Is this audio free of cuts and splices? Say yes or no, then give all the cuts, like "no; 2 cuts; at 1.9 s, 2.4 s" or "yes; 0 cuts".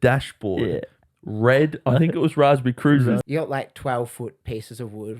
no; 1 cut; at 3.2 s